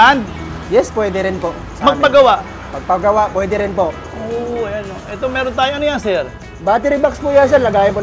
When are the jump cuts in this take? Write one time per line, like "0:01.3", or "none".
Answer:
none